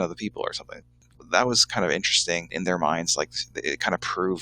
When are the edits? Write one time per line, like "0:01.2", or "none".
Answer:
0:01.1